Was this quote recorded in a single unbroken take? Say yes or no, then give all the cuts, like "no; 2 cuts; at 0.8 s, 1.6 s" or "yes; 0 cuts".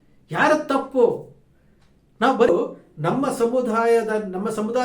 no; 1 cut; at 2.5 s